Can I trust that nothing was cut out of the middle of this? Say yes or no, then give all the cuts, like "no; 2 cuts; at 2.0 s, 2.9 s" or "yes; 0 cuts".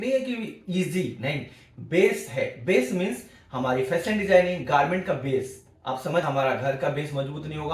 no; 1 cut; at 6.2 s